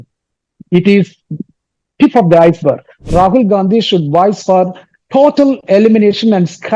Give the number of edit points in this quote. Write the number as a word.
one